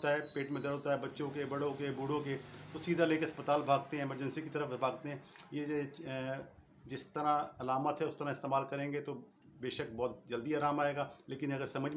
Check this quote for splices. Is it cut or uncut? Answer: uncut